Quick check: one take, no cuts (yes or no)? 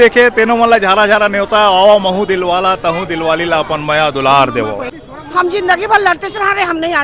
no